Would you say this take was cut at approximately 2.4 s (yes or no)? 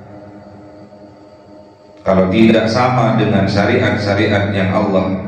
yes